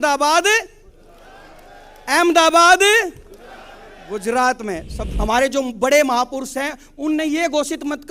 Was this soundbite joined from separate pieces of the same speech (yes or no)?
yes